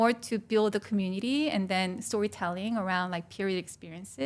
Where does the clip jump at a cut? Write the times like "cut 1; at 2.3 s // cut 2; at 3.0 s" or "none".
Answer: none